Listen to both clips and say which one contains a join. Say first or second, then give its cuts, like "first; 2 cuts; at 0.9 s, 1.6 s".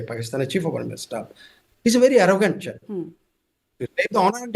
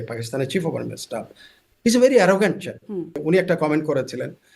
second; 1 cut; at 3.2 s